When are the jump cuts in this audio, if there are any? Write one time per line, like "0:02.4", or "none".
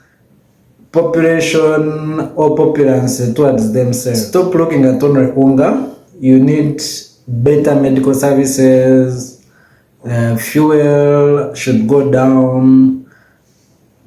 0:04.2